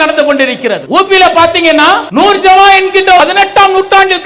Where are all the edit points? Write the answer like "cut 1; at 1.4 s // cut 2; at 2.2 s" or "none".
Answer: cut 1; at 0.8 s // cut 2; at 2.1 s // cut 3; at 3.2 s